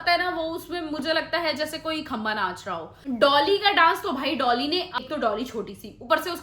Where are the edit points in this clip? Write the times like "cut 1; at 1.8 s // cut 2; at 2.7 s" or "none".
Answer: cut 1; at 2.9 s // cut 2; at 5.0 s

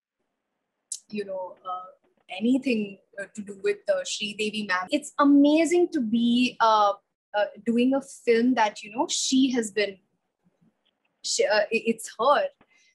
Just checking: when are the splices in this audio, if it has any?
cut 1; at 4.9 s

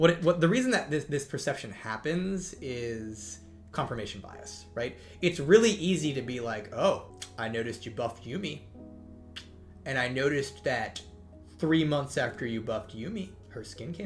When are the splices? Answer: cut 1; at 7.2 s

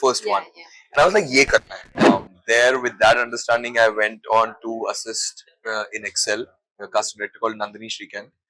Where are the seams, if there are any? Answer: cut 1; at 2.1 s

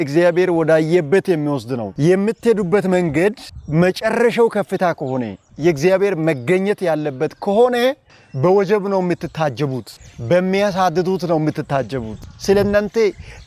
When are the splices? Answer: cut 1; at 1.9 s

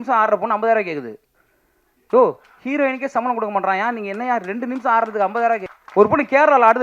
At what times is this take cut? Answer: cut 1; at 5.8 s

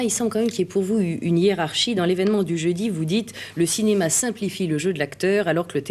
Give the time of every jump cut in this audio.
none

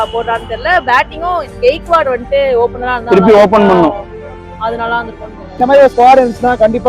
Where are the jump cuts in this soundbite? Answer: cut 1; at 5.5 s

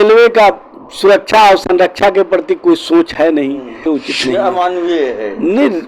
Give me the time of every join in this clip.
cut 1; at 3.9 s

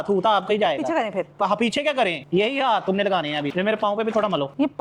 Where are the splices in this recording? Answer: none

